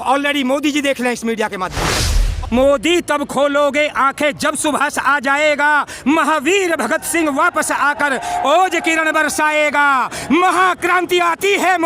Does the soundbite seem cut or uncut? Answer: cut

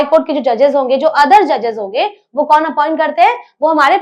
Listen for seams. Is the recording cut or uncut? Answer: uncut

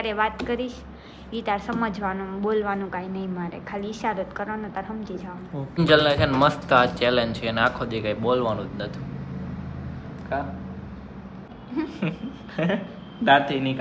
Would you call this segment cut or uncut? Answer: cut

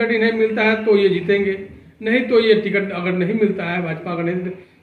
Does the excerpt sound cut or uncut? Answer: uncut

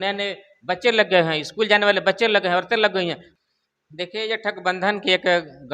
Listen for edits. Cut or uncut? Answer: cut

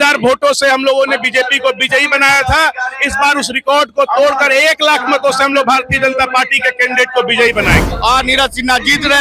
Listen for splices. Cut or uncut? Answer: cut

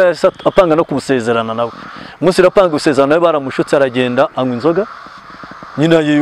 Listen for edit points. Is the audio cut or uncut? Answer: uncut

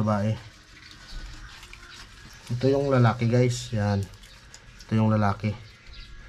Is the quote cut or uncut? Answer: cut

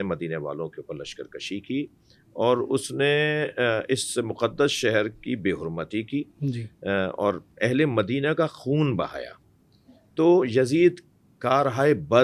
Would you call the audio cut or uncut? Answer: uncut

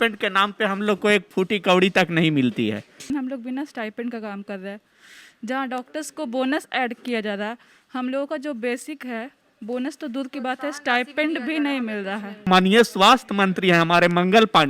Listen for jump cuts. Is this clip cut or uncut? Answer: cut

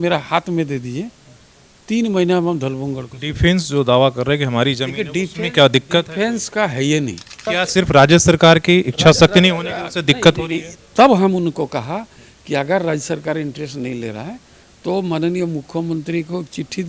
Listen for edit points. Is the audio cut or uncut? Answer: cut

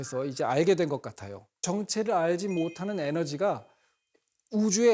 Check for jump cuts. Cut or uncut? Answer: cut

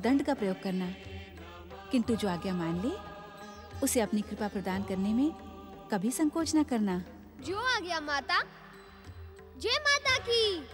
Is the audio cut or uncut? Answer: uncut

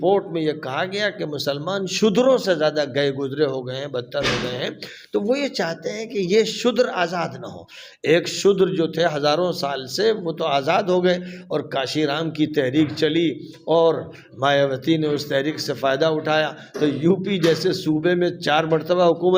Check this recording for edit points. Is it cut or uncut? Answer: uncut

